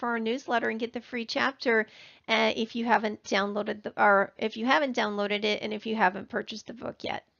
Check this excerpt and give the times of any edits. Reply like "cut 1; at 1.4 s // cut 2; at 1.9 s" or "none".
cut 1; at 3.5 s